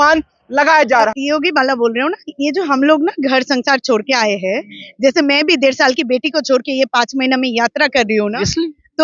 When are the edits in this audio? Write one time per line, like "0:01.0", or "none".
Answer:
0:01.1